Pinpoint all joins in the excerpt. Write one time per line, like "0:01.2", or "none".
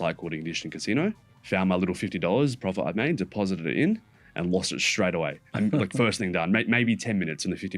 0:01.3